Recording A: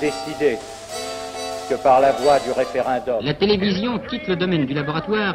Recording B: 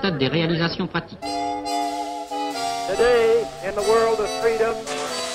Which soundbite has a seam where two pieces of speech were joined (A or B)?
A